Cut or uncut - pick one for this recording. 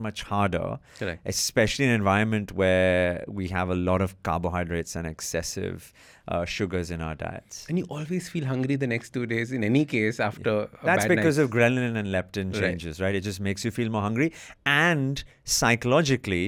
uncut